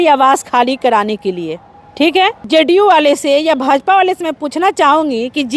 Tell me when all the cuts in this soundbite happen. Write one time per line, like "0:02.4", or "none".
0:02.4

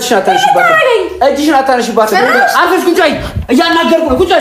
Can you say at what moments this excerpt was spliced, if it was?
none

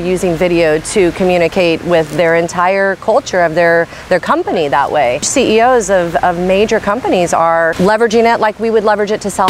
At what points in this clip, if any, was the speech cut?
0:05.3
0:07.7

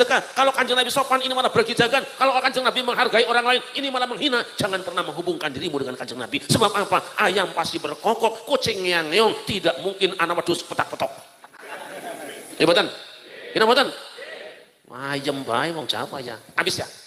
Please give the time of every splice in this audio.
none

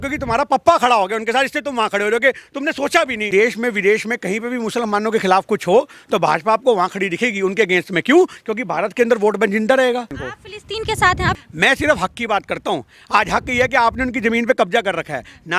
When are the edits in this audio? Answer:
0:03.3
0:10.2
0:11.4

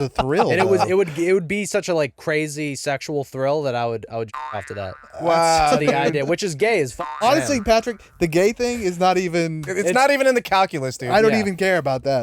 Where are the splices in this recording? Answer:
0:07.0
0:09.7

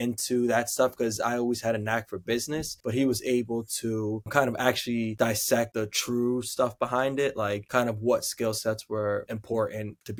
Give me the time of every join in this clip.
none

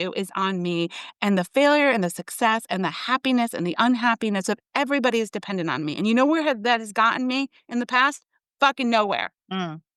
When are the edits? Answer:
none

